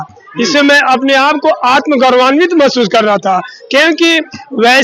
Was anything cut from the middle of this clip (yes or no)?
no